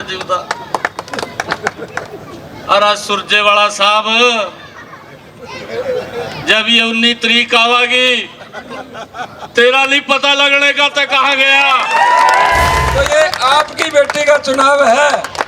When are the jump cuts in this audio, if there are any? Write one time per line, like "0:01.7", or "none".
0:12.8